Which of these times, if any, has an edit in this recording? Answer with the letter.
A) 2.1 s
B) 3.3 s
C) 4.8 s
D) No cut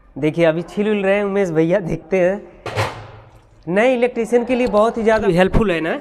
D